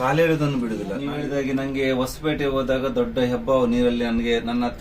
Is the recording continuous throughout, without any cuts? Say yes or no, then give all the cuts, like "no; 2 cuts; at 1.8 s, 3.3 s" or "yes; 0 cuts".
no; 1 cut; at 1.0 s